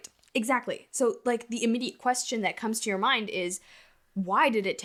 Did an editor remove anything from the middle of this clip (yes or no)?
no